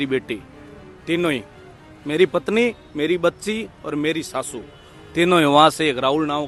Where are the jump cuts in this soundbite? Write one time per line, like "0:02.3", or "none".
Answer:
none